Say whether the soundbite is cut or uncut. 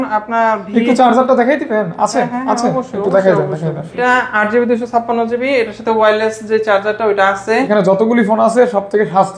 cut